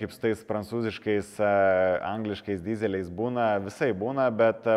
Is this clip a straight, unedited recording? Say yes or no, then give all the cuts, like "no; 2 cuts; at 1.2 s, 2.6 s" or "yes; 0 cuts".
yes; 0 cuts